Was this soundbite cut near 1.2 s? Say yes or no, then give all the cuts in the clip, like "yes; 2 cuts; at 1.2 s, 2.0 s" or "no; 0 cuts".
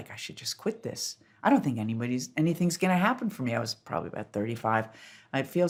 no; 0 cuts